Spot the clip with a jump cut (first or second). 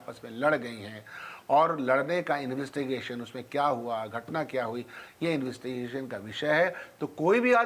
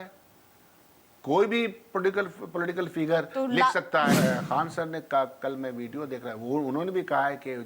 second